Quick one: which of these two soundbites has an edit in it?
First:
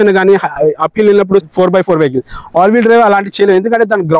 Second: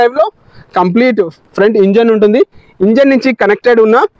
first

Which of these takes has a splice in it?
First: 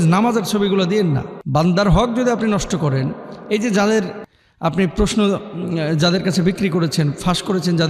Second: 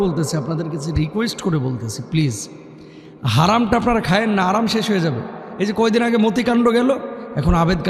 first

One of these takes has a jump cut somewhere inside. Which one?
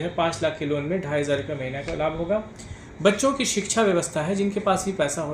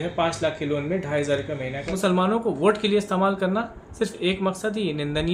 second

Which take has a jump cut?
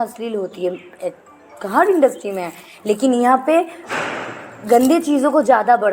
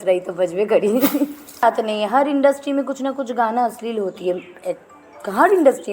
second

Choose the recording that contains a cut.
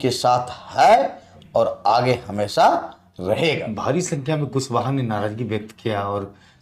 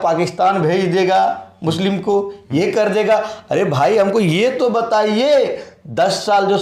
first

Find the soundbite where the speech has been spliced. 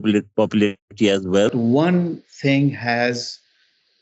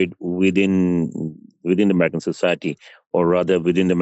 first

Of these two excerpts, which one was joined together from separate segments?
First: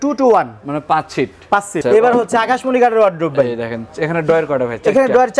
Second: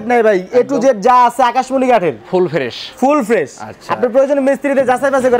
first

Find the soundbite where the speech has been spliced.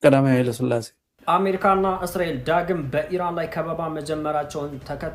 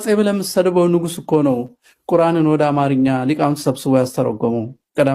first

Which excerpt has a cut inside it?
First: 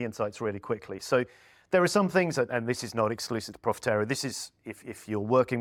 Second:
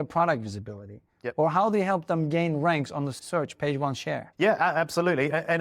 second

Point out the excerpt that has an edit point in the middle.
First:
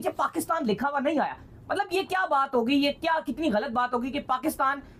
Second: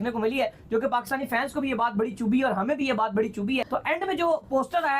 second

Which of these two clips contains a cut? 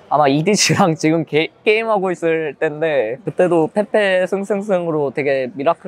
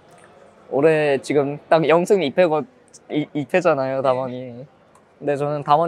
first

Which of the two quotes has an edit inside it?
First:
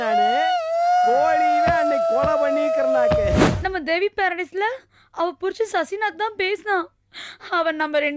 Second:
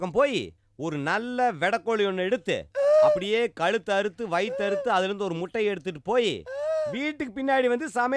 first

